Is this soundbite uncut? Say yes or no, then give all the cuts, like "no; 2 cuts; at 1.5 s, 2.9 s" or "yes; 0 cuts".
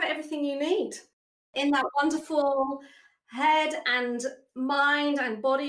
no; 1 cut; at 1.4 s